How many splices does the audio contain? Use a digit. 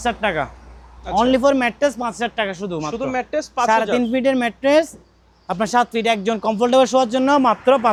0